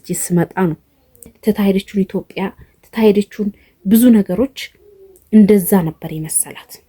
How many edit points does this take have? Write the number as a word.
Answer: one